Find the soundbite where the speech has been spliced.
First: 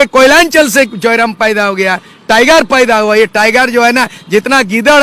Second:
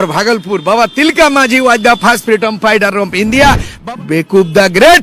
second; 1 cut; at 3.7 s

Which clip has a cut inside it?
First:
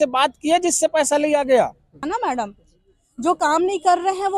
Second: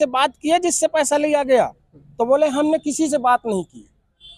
first; 1 cut; at 2.1 s

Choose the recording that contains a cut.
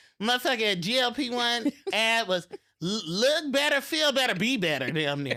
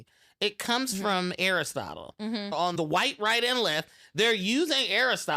second; 1 cut; at 2.7 s

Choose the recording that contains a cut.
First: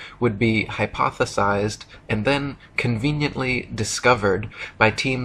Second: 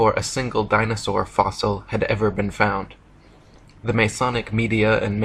second; 1 cut; at 1.4 s

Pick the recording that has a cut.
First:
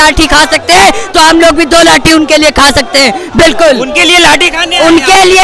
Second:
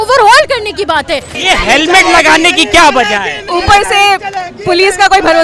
second; 2 cuts; at 1.3 s, 3.5 s

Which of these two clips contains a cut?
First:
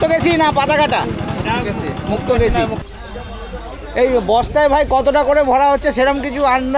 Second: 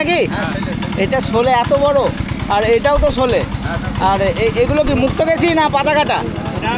first; 1 cut; at 2.8 s

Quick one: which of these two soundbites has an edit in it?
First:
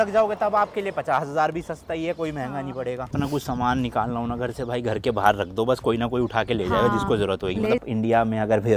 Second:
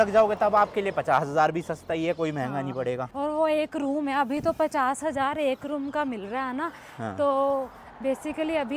first; 2 cuts; at 3.1 s, 7.8 s

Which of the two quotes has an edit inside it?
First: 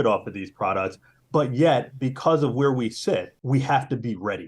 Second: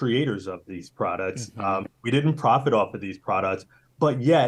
first; 1 cut; at 3.3 s

